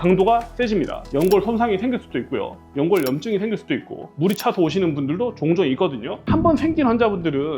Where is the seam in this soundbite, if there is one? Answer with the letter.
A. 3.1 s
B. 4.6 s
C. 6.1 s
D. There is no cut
C